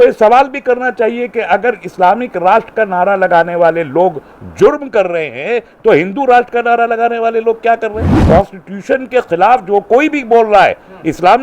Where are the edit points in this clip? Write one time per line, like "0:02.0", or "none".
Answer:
0:08.1